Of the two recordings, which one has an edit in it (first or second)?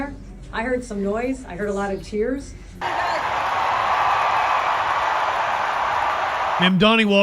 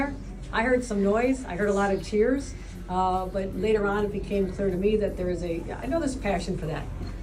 first